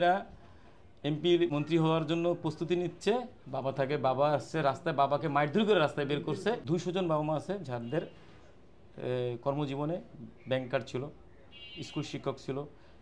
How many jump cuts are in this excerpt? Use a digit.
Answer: 2